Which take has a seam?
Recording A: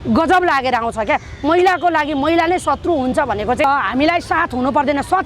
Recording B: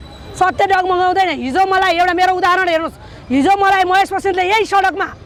A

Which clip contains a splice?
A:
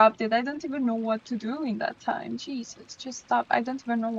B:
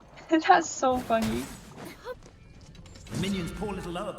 B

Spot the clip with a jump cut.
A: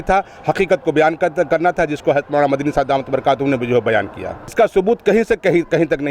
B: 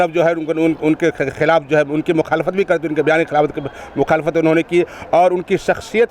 A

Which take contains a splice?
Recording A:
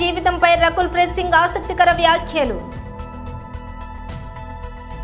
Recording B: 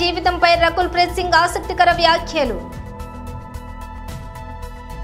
B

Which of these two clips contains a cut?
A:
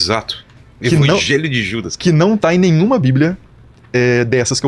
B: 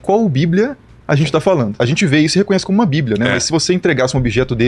B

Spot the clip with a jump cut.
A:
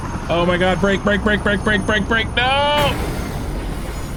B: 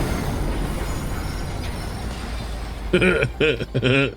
B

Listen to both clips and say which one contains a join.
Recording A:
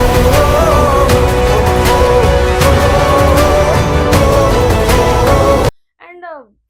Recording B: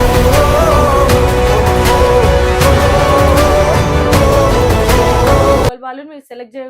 B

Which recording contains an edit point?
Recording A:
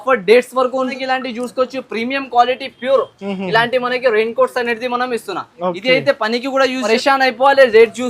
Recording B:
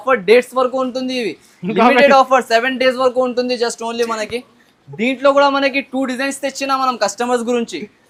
A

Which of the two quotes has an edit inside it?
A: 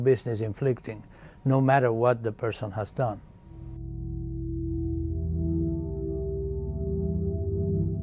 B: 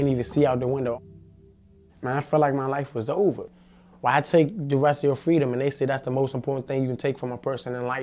B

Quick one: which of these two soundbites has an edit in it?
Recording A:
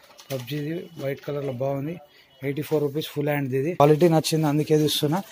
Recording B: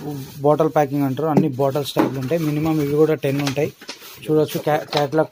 A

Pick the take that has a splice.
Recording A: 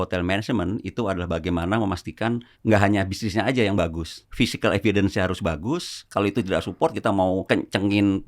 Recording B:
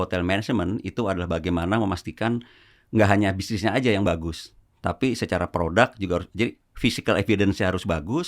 A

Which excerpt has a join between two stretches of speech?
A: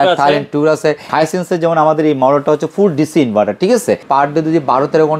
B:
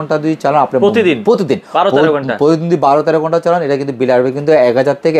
A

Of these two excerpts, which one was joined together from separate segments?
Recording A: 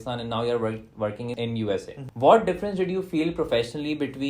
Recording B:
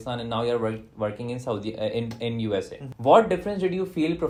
A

